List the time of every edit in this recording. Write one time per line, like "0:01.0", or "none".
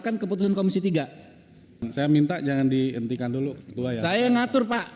0:01.9